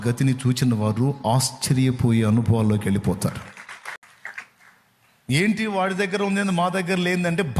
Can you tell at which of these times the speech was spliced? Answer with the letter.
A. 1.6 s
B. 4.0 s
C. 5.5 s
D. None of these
B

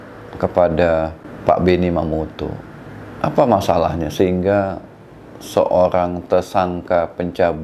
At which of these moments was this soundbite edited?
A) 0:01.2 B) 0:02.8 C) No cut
A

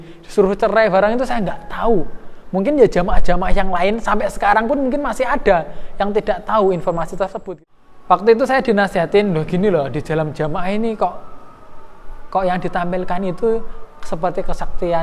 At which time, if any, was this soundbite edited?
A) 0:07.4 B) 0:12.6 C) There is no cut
A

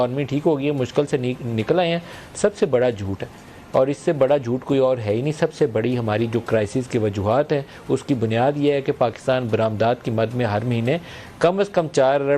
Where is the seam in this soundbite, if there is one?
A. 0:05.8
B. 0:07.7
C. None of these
C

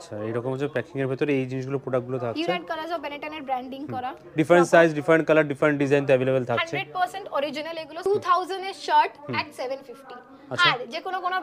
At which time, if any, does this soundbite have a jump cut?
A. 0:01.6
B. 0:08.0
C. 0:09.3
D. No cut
B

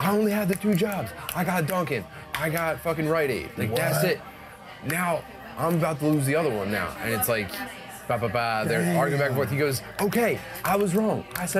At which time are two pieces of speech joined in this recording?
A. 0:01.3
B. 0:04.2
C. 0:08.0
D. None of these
D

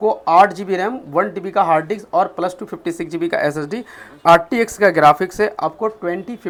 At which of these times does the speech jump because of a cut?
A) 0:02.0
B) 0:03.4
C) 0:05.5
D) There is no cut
D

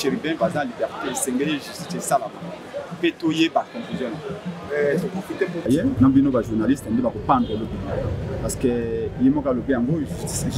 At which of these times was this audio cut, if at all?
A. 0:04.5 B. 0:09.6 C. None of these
C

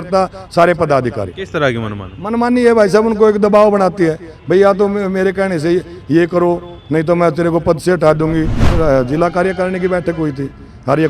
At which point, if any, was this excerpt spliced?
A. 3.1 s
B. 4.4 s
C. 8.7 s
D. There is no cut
C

